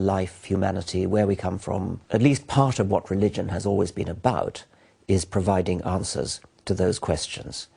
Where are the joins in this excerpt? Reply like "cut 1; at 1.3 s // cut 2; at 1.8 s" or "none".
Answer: cut 1; at 2.0 s